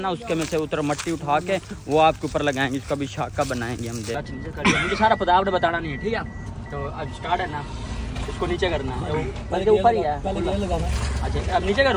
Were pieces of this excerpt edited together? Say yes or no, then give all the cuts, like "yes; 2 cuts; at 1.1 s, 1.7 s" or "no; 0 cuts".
yes; 1 cut; at 4.1 s